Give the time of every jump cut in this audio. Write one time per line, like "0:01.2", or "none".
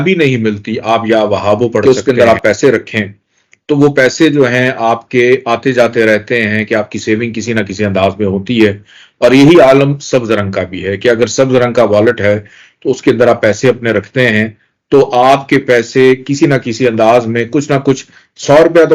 0:01.8